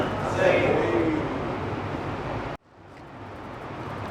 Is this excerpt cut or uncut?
cut